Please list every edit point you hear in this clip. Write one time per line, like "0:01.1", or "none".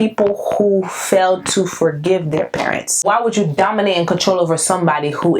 0:02.9